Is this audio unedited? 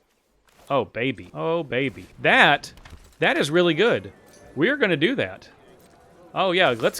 no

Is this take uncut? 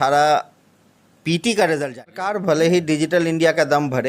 no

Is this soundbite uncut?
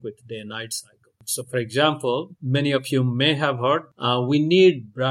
no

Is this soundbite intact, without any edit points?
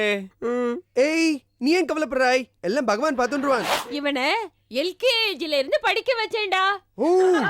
no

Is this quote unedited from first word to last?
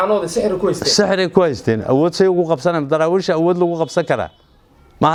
yes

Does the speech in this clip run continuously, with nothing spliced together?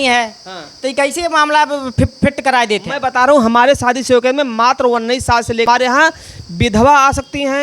no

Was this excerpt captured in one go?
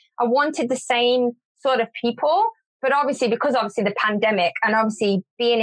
no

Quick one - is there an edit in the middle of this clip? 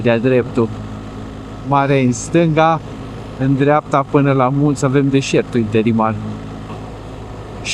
no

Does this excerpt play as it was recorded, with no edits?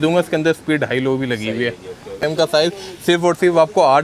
no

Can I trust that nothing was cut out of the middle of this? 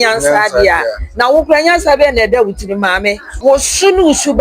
no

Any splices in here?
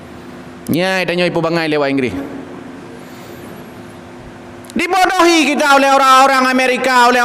no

